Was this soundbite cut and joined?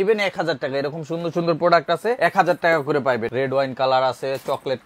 yes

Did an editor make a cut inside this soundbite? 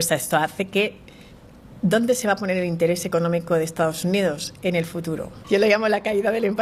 yes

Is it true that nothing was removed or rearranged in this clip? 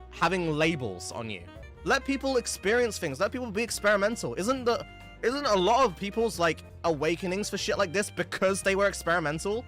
no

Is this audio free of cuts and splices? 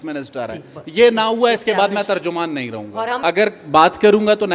no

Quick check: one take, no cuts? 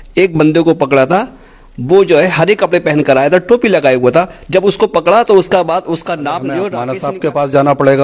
no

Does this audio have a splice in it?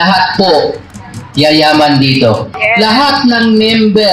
yes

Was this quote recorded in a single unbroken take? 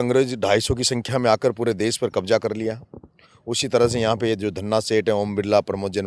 yes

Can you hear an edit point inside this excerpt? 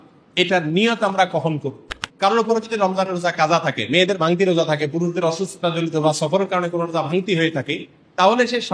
yes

